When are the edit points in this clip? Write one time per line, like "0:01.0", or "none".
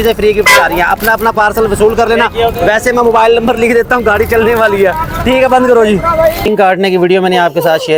none

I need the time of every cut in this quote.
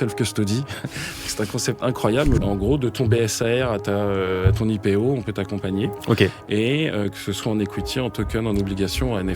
0:02.4

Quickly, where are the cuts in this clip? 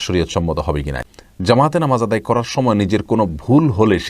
0:01.1

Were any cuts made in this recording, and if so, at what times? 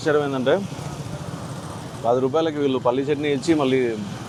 none

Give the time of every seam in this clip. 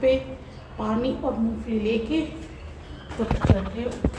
none

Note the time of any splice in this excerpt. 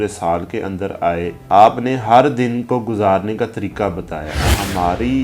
0:01.4
0:04.4

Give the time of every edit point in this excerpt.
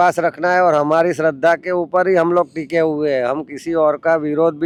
none

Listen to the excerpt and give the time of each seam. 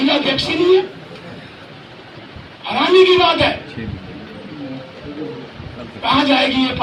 none

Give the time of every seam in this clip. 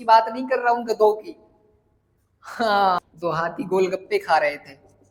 0:03.0

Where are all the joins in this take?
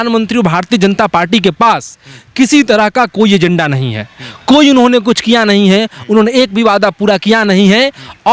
none

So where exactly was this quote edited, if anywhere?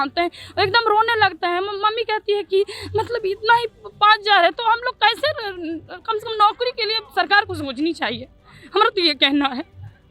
none

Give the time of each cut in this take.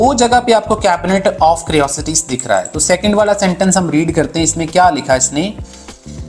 none

